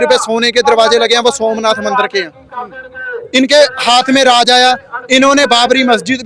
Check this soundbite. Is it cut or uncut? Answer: uncut